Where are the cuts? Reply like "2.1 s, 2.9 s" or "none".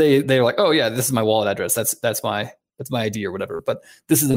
none